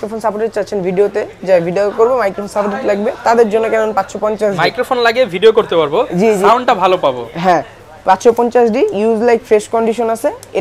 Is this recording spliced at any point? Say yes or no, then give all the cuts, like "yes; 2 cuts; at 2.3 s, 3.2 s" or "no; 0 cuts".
no; 0 cuts